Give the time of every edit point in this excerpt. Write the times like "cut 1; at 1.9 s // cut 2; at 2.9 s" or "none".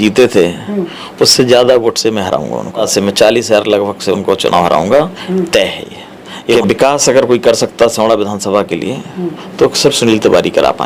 cut 1; at 2.9 s // cut 2; at 6.5 s